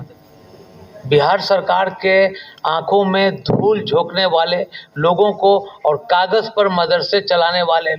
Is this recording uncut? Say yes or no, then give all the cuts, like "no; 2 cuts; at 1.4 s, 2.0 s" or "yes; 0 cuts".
yes; 0 cuts